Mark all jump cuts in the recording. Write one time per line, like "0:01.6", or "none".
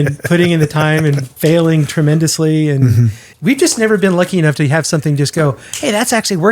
0:03.2